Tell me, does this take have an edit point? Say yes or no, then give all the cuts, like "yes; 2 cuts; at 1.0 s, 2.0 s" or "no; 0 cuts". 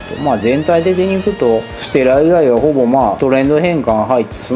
yes; 1 cut; at 3.2 s